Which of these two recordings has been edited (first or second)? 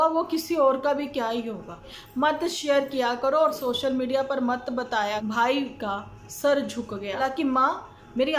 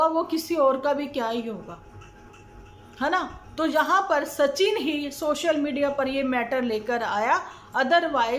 first